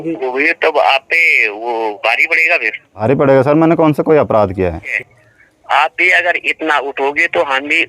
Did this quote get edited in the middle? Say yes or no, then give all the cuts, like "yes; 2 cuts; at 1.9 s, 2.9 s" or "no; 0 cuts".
yes; 2 cuts; at 3.0 s, 4.9 s